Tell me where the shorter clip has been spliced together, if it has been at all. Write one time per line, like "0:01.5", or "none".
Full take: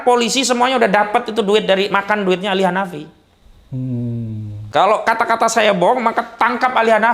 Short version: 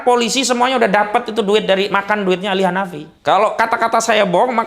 0:03.0